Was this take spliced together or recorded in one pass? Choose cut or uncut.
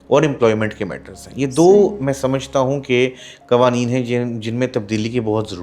uncut